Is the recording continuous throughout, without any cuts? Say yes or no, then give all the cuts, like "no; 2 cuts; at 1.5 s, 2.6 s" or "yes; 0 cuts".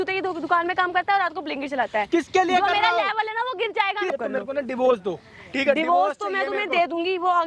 no; 1 cut; at 4.1 s